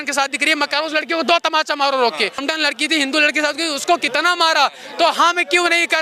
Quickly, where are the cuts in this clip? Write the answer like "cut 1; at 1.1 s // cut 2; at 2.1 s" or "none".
cut 1; at 2.4 s